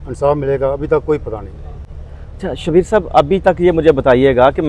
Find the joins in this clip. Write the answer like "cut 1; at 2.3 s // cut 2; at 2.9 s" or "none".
none